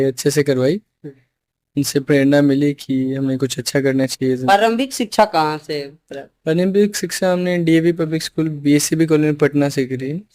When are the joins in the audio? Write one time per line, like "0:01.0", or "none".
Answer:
none